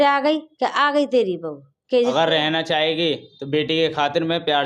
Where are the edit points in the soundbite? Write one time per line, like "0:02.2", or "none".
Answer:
0:02.1